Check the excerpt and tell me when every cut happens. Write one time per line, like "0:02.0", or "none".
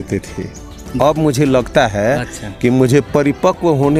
none